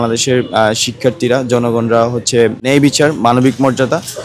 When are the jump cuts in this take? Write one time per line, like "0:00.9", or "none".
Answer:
0:02.6